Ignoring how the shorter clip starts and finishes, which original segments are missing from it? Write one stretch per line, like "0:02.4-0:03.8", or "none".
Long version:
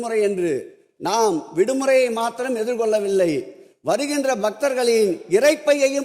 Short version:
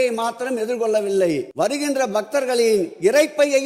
0:03.5-0:03.8